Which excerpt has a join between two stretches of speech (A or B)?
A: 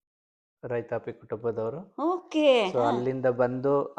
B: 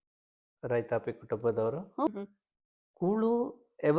B